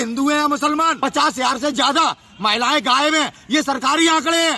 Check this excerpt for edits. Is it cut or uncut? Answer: cut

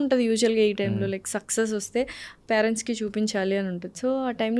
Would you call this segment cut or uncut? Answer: uncut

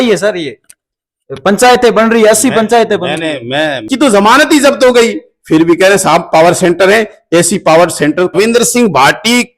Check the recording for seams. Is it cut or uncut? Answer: cut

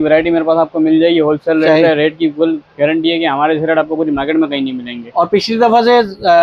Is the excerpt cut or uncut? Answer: uncut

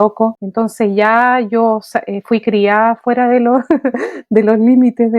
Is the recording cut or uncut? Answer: uncut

